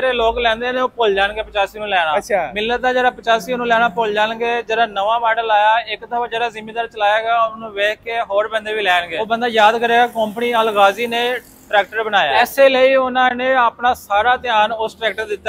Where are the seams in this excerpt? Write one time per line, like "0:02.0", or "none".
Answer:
0:02.1
0:09.1
0:12.3